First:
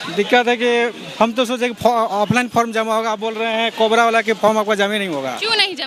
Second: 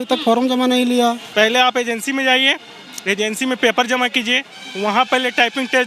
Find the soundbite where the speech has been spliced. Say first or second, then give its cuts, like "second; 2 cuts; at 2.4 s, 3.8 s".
second; 1 cut; at 1.2 s